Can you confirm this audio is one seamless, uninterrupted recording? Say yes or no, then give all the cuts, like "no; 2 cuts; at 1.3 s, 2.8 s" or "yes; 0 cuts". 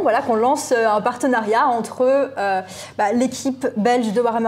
yes; 0 cuts